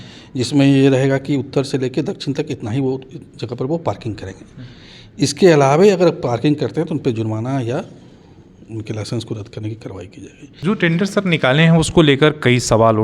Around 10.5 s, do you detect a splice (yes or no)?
yes